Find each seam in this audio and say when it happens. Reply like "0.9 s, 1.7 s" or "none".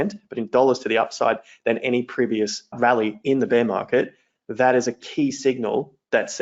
2.7 s